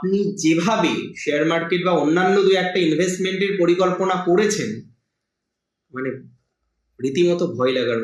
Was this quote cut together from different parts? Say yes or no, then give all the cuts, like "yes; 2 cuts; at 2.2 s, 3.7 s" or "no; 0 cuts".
no; 0 cuts